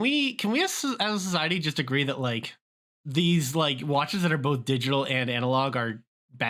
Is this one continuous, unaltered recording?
yes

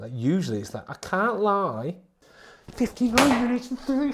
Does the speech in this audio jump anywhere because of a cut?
yes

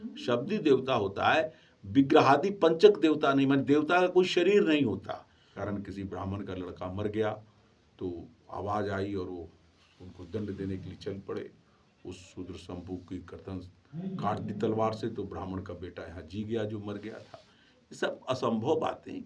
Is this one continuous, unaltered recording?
no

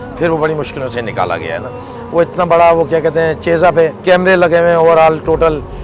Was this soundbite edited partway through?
yes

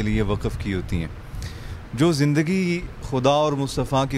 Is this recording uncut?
yes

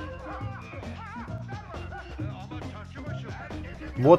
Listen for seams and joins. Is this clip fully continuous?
yes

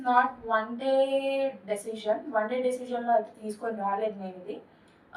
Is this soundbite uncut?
yes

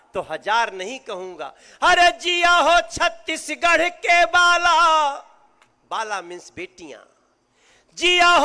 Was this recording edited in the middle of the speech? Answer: no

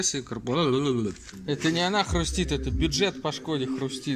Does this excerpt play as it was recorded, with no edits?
no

